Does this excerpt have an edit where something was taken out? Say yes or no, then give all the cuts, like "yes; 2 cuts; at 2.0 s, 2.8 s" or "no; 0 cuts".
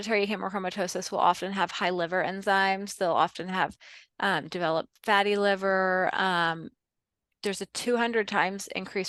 no; 0 cuts